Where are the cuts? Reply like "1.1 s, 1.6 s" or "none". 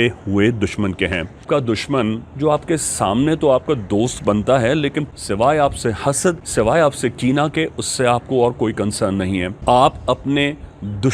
1.4 s, 5.1 s, 6.4 s, 9.5 s